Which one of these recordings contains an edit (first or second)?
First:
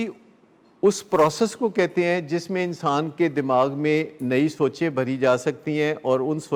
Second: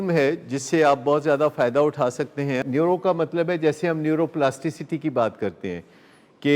second